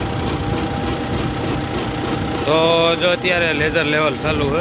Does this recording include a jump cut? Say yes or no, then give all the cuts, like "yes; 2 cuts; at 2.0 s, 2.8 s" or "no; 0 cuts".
no; 0 cuts